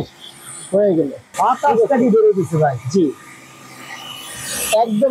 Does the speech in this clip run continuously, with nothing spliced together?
no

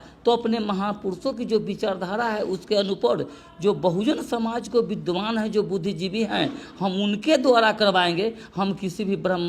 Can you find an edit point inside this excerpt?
no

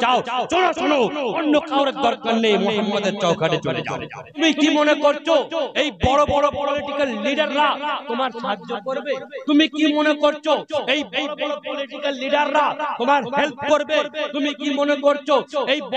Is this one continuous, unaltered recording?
no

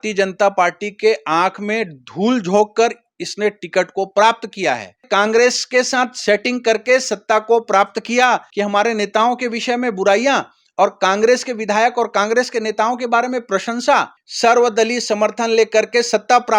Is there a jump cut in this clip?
yes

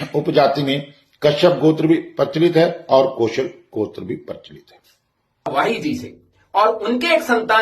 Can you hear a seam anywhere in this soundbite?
yes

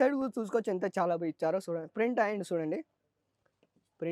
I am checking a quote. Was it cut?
no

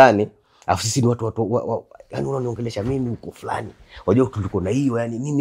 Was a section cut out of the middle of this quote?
no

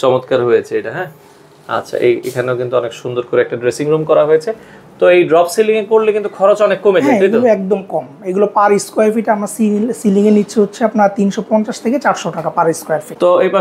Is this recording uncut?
yes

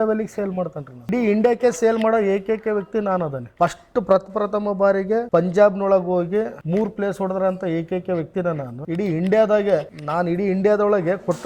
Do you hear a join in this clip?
yes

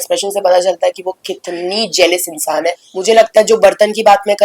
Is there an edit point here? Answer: yes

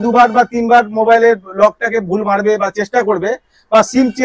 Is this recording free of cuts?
yes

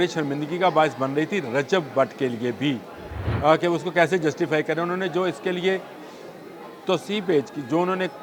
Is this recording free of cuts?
yes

